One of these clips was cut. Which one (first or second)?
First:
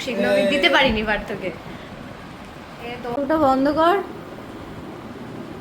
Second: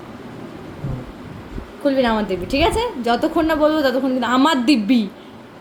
first